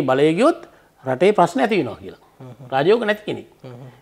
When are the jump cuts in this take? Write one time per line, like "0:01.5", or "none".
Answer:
none